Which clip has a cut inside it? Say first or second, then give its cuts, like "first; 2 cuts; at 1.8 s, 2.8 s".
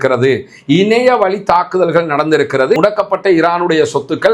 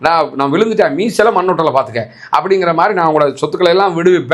first; 1 cut; at 2.8 s